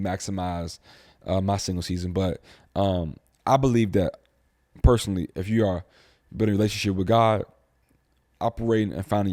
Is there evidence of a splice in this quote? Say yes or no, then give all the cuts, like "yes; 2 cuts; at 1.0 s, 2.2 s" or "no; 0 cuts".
no; 0 cuts